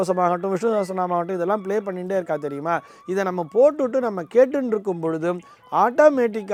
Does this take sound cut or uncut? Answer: uncut